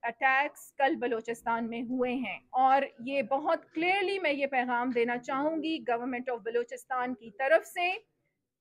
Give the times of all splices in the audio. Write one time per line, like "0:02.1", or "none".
0:02.4